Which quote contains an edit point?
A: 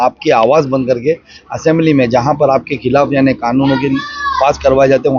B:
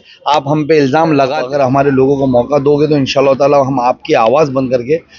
B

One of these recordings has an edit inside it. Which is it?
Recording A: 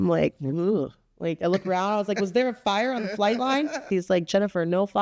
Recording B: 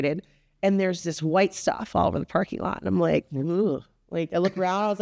A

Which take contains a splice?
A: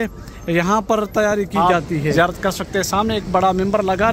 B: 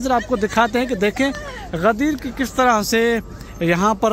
A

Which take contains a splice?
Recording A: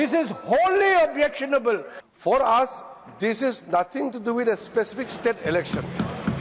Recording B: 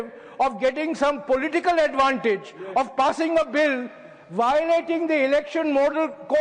A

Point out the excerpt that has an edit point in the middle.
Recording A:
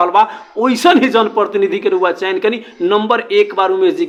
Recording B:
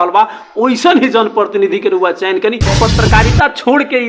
B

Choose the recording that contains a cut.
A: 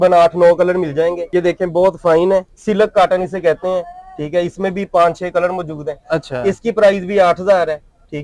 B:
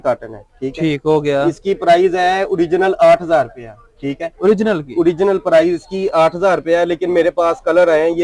A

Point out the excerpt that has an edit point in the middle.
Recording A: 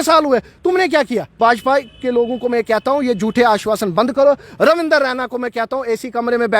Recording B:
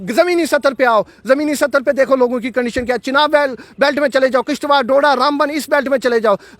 A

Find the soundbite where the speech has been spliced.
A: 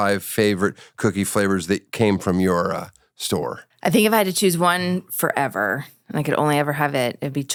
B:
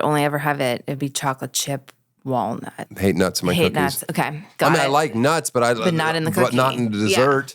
B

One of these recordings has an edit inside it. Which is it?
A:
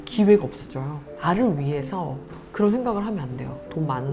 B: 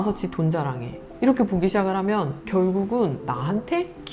A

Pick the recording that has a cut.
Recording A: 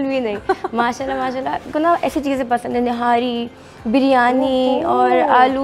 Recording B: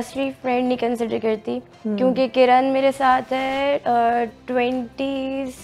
A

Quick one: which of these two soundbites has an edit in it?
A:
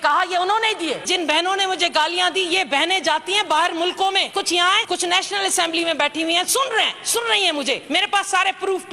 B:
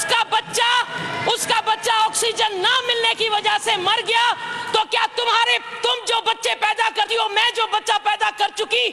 A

